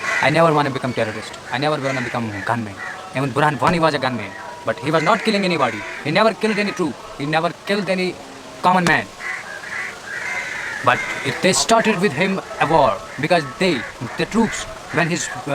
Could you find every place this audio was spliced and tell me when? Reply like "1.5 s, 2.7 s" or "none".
none

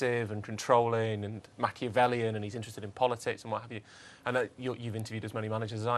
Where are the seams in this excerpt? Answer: 3.4 s

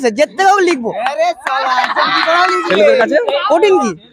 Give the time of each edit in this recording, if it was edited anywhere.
none

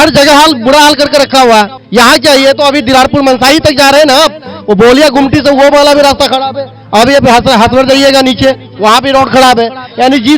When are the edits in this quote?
1.8 s

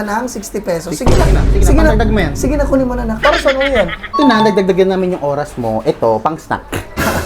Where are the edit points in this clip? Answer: 4.1 s

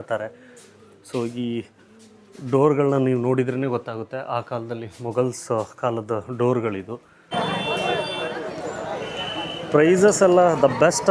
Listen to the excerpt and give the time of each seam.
7.3 s

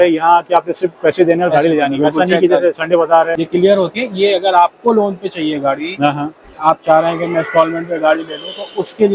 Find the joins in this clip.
3.4 s

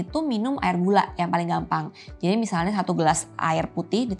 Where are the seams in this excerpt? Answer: none

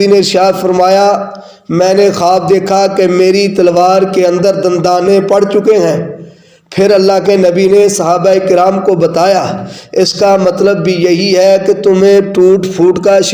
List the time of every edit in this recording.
none

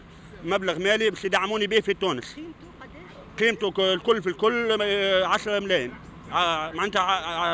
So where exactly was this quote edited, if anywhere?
none

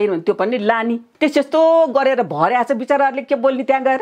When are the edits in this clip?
1.1 s

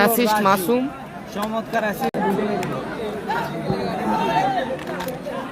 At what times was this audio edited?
2.1 s

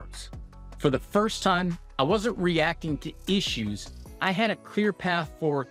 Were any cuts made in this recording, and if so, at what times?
none

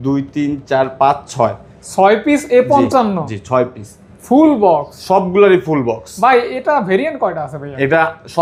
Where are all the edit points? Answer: none

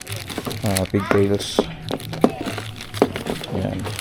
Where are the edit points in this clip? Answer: none

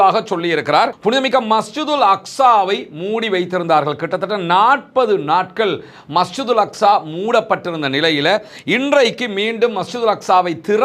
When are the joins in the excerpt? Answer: 0.9 s

